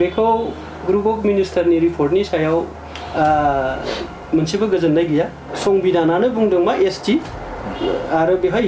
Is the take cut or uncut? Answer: cut